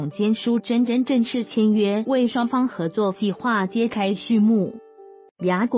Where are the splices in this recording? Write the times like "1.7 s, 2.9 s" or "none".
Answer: 4.8 s